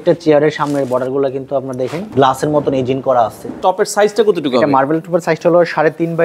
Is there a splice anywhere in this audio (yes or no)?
yes